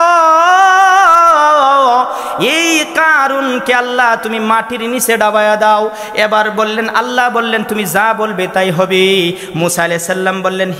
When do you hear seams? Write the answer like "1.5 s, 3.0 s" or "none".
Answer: none